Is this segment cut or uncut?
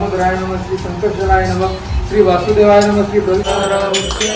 cut